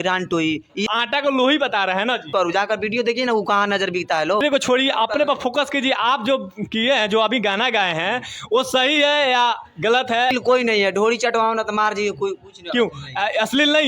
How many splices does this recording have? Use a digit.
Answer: 4